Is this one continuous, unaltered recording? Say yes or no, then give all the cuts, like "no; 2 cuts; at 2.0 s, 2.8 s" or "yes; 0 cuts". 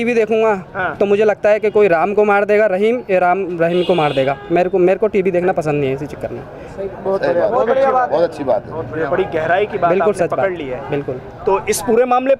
yes; 0 cuts